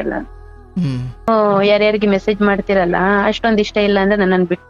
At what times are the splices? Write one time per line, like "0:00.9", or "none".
0:01.3